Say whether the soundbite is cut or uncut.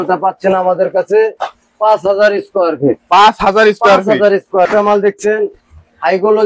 cut